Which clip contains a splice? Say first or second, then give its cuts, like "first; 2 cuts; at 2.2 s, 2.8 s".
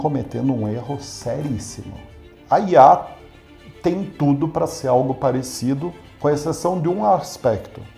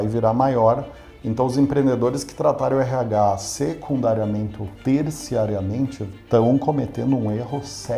first; 1 cut; at 2.3 s